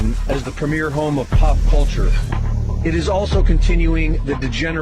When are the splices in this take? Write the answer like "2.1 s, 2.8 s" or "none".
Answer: none